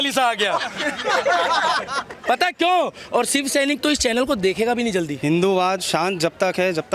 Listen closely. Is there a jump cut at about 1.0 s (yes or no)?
no